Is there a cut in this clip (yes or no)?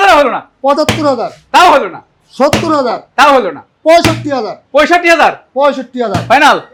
no